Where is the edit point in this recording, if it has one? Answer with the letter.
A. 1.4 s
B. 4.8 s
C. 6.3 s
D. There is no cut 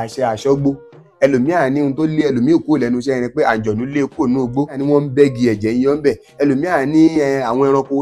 B